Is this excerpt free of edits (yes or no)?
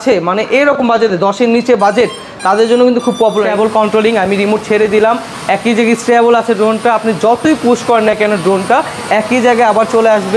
no